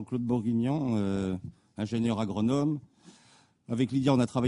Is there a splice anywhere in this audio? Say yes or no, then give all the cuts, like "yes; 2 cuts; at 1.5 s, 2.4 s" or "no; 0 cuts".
no; 0 cuts